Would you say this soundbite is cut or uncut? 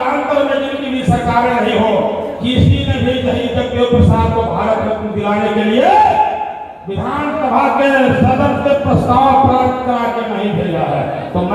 uncut